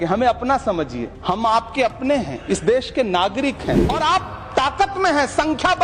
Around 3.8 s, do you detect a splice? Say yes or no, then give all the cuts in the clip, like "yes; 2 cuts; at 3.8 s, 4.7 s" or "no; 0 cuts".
yes; 2 cuts; at 1.1 s, 3.8 s